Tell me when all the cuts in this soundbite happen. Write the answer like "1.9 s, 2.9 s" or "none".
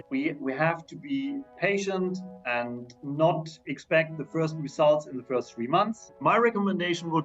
1.5 s, 6.1 s